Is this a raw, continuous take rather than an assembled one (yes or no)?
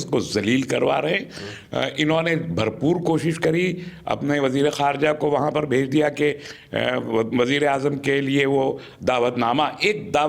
yes